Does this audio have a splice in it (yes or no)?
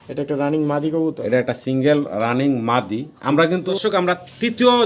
yes